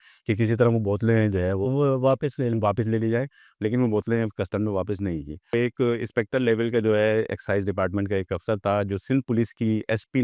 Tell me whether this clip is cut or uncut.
cut